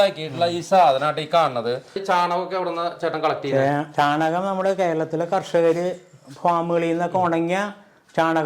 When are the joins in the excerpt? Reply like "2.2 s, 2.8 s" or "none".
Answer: 2.0 s

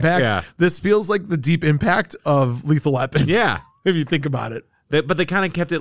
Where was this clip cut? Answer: none

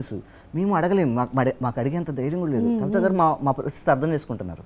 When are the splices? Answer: none

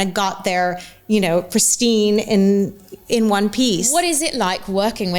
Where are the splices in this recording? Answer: 3.9 s

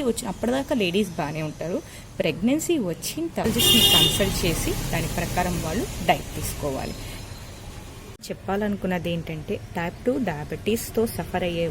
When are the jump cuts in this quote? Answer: 3.5 s, 8.1 s

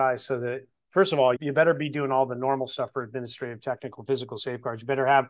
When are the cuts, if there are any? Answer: 1.4 s

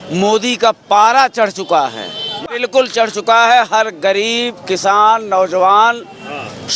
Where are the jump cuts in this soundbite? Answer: 2.5 s

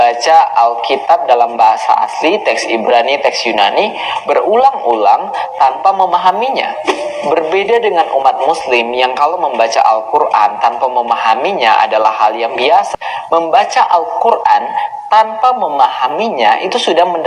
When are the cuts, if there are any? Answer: none

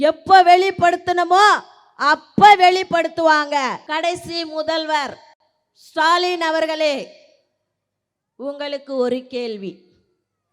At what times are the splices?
3.8 s

